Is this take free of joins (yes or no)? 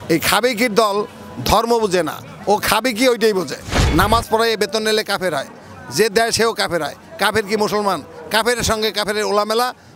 yes